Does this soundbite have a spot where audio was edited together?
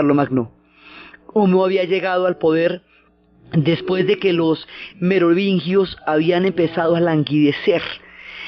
yes; 1 cut; at 4.6 s

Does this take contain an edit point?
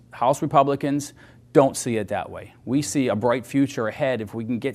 no; 0 cuts

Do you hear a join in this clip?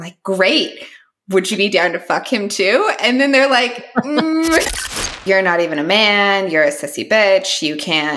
yes; 1 cut; at 5.1 s

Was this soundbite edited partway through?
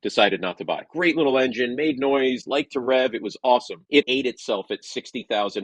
yes; 2 cuts; at 0.9 s, 4.1 s

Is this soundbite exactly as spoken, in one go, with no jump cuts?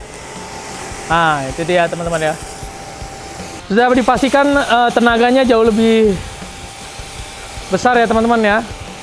no; 1 cut; at 3.5 s

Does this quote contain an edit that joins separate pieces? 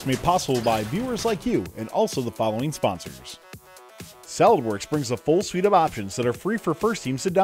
yes; 1 cut; at 3.8 s

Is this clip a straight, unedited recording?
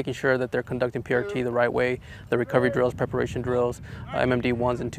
yes; 0 cuts

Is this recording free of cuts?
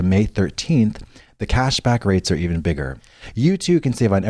no; 1 cut; at 3.0 s

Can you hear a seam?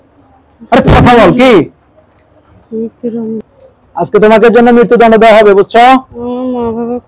yes; 1 cut; at 3.3 s

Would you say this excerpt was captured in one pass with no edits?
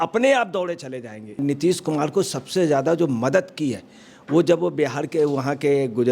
no; 1 cut; at 1.4 s

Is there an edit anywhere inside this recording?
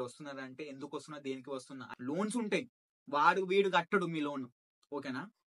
yes; 1 cut; at 1.9 s

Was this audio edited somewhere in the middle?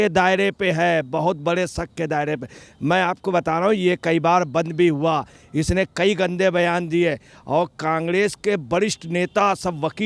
no; 0 cuts

